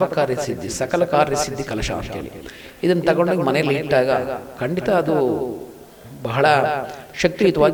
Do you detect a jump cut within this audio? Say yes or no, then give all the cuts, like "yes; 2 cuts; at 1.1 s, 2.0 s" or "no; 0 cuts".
no; 0 cuts